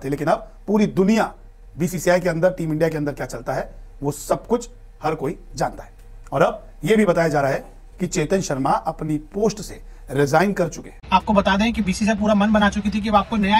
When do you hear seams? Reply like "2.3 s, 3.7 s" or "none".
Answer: 10.9 s